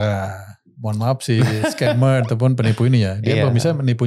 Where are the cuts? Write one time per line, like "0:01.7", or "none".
none